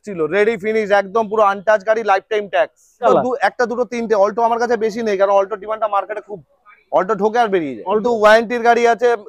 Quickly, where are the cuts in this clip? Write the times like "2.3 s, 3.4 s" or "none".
3.0 s, 8.0 s